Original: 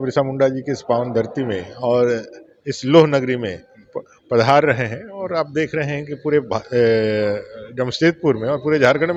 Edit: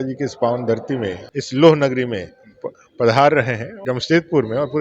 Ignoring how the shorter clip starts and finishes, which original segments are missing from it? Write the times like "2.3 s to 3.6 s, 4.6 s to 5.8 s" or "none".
1.7 s to 2.5 s, 5.0 s to 7.6 s